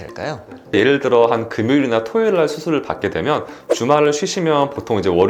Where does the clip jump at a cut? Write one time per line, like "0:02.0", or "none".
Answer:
none